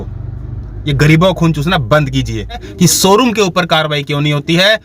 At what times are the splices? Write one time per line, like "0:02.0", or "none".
0:02.6